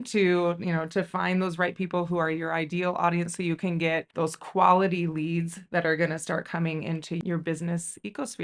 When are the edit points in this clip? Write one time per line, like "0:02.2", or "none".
0:07.2